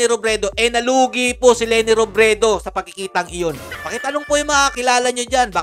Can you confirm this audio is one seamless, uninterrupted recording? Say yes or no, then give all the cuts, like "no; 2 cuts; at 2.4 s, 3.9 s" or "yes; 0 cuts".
no; 2 cuts; at 3.7 s, 4.7 s